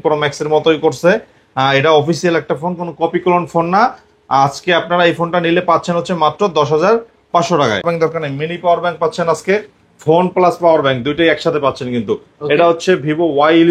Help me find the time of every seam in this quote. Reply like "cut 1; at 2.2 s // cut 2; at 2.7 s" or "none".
cut 1; at 7.8 s